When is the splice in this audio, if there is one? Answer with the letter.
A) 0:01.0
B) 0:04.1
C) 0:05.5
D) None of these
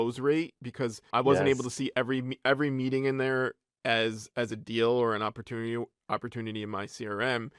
A